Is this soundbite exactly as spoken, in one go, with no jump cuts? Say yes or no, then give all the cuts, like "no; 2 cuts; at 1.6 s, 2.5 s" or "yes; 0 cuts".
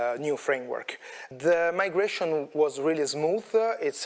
no; 1 cut; at 1.2 s